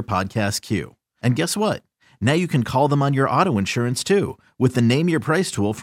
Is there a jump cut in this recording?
no; 0 cuts

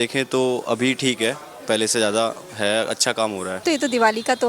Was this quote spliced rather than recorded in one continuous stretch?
yes; 1 cut; at 3.5 s

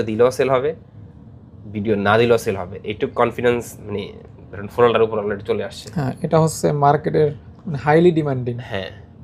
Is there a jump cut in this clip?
no; 0 cuts

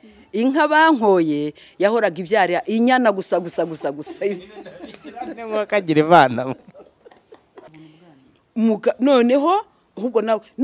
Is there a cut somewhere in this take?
yes; 1 cut; at 7.7 s

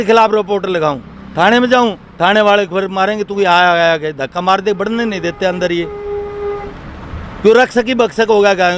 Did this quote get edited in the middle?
no; 0 cuts

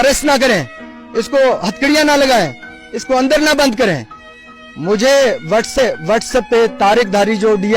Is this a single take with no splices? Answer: yes; 0 cuts

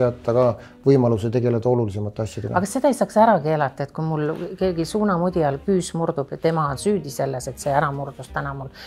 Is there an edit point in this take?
no; 0 cuts

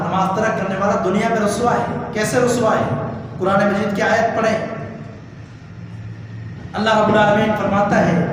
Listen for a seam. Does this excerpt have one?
no; 0 cuts

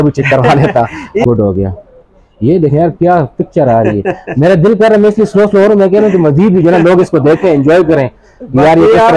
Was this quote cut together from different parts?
yes; 1 cut; at 1.2 s

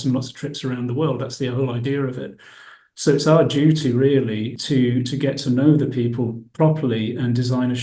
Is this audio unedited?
no; 1 cut; at 4.6 s

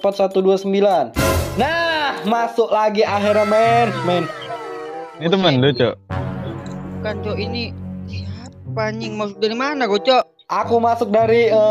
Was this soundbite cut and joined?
yes; 1 cut; at 5.1 s

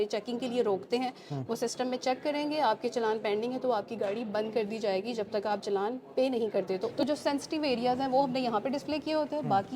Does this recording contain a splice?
yes; 1 cut; at 6.9 s

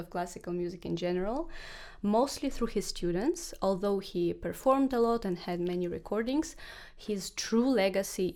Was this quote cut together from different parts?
no; 0 cuts

